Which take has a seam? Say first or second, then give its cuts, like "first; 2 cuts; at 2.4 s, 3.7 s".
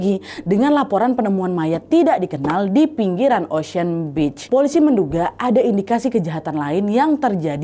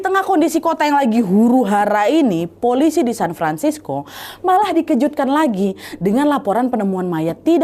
first; 1 cut; at 4.4 s